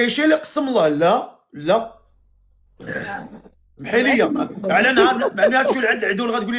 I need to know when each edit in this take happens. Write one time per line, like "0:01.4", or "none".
none